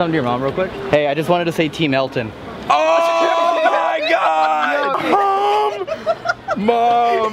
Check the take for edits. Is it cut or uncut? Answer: cut